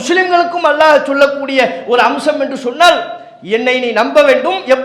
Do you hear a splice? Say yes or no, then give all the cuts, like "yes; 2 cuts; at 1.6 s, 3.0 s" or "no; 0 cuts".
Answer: no; 0 cuts